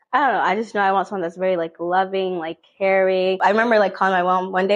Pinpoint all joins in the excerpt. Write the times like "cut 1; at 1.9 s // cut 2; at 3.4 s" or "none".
cut 1; at 3.4 s